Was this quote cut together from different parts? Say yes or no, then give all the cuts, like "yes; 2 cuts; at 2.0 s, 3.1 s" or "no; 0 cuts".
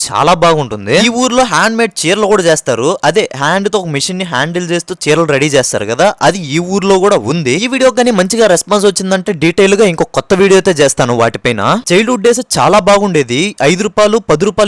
no; 0 cuts